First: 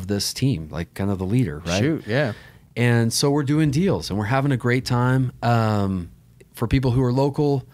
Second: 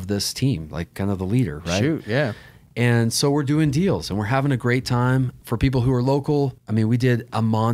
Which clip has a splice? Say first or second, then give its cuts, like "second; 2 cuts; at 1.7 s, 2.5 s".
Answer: second; 2 cuts; at 5.3 s, 6.6 s